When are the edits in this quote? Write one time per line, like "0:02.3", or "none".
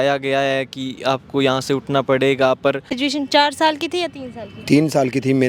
0:03.3